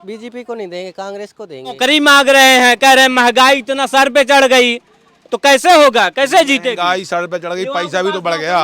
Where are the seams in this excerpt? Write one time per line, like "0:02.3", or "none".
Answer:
0:01.7